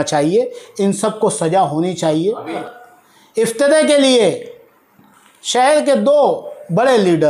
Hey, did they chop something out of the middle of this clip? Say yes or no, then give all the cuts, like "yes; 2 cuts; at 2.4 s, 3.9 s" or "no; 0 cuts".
yes; 1 cut; at 2.6 s